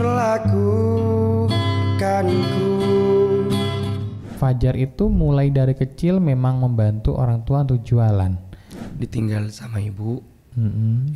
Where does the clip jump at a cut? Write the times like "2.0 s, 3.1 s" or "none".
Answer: 4.1 s, 8.7 s